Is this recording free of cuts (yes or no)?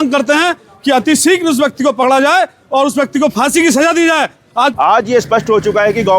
no